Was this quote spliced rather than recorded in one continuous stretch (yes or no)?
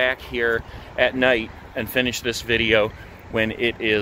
no